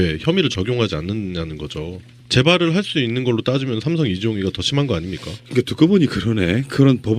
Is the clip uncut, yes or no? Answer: yes